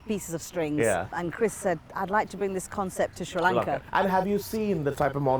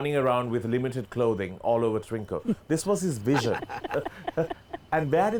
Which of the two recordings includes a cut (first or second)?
first